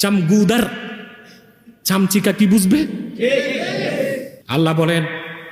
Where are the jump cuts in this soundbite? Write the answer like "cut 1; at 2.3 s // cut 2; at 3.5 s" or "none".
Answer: cut 1; at 4.3 s